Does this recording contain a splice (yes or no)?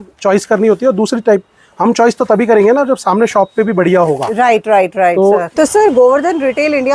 yes